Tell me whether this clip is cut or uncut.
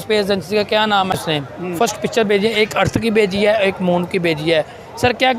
cut